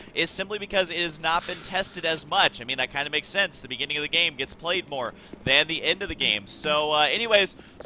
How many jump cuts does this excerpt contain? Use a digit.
1